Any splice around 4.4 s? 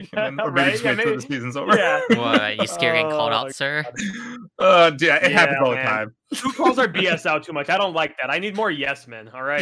no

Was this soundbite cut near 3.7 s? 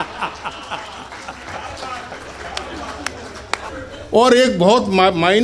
yes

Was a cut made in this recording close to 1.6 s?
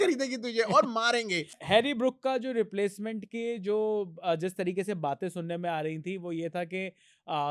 yes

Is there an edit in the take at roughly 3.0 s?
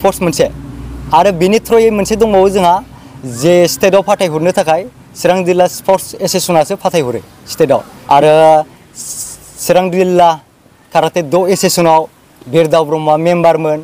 no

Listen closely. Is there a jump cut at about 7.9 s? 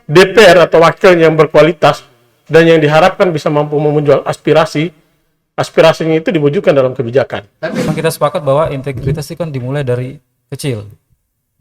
yes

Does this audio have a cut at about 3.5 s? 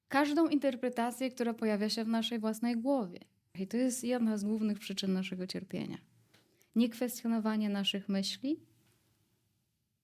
yes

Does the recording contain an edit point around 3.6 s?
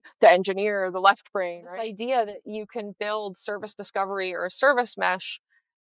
no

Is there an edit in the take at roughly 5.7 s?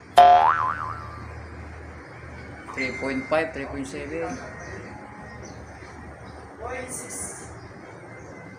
no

